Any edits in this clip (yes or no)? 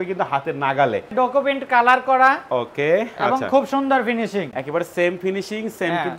yes